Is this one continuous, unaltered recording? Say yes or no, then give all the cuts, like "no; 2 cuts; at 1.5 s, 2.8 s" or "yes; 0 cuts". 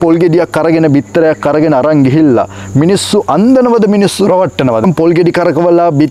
no; 1 cut; at 4.8 s